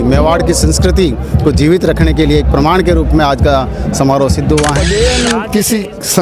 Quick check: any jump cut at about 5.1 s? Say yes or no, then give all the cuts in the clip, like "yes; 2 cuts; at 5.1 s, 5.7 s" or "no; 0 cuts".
yes; 1 cut; at 5.1 s